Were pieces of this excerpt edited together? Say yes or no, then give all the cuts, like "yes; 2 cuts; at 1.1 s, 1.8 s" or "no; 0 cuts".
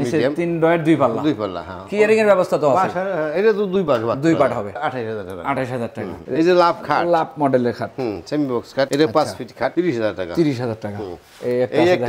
no; 0 cuts